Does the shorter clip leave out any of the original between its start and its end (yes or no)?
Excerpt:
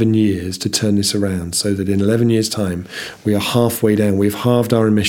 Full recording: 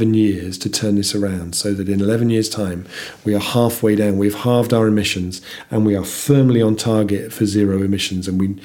no